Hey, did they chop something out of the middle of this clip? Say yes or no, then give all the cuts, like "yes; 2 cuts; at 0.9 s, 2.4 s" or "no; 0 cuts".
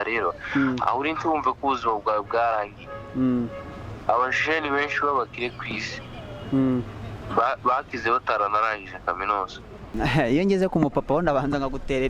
yes; 1 cut; at 9.9 s